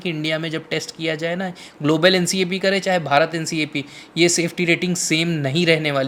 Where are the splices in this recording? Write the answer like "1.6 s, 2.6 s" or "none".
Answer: none